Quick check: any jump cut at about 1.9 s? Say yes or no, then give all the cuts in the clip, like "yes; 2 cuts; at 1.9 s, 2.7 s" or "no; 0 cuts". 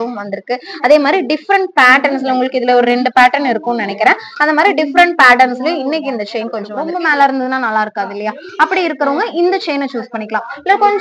no; 1 cut; at 6.8 s